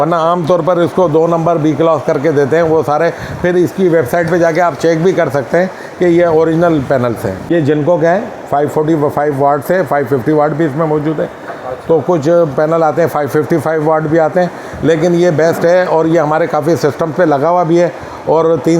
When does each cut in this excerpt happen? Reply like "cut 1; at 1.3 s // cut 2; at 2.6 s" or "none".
cut 1; at 7.4 s